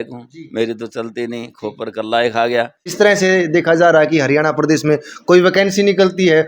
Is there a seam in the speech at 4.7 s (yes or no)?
no